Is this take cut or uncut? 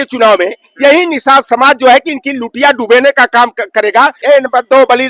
cut